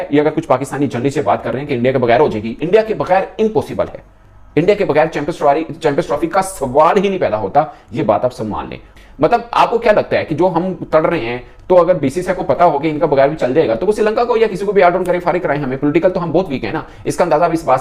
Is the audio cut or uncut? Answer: uncut